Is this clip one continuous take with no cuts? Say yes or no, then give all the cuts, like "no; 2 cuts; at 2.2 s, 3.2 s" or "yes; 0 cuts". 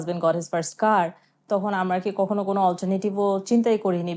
yes; 0 cuts